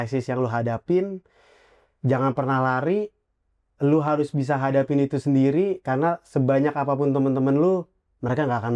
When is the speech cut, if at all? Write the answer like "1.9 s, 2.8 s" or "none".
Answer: none